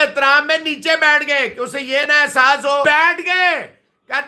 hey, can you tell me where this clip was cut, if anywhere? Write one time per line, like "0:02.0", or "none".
0:02.8